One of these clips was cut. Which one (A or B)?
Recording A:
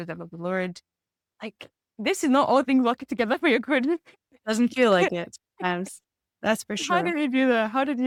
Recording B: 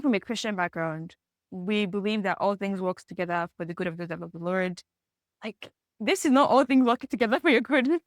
B